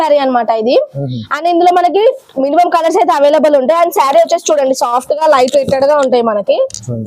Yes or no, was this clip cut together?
no